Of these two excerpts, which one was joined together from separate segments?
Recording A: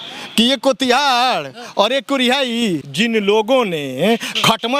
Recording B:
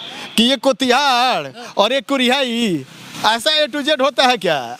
A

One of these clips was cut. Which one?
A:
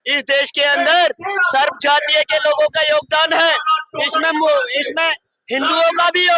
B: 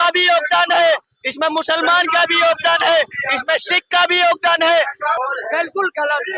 B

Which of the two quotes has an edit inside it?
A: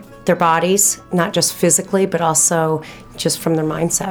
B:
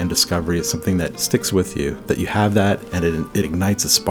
B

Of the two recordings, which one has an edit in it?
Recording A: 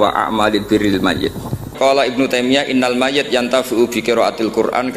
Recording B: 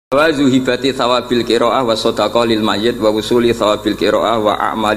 A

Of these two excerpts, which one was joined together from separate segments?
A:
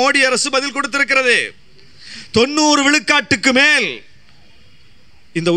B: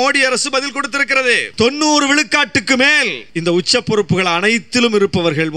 B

